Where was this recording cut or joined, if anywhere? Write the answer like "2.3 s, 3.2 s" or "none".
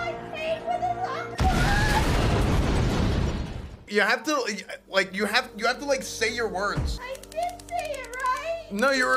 3.9 s, 7.0 s